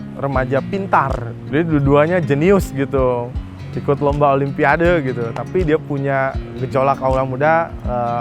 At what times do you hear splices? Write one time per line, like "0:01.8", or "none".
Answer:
0:01.3
0:07.0